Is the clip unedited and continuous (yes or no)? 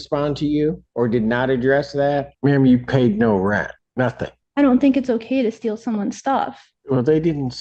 no